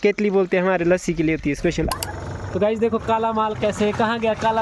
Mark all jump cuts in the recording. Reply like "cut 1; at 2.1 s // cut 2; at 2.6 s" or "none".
cut 1; at 1.9 s